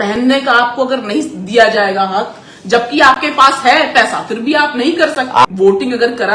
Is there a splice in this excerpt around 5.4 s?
yes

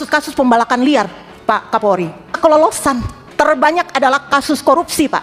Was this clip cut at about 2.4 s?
yes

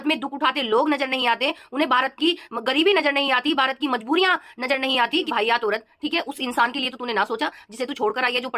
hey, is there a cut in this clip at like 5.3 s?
yes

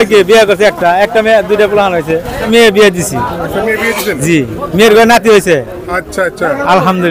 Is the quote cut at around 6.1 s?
no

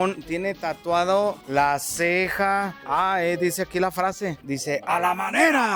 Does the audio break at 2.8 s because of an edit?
yes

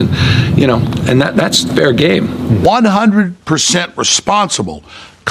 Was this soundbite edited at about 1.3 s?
no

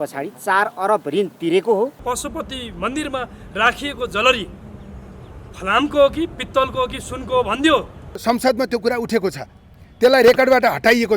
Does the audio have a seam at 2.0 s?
yes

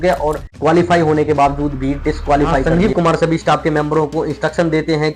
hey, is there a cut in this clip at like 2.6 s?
yes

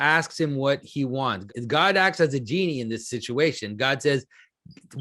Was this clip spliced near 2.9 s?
no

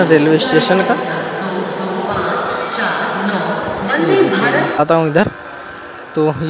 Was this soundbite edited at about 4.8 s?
yes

